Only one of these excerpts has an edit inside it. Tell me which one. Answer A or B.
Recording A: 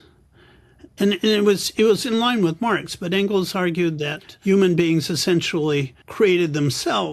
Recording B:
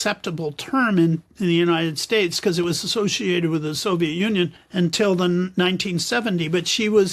B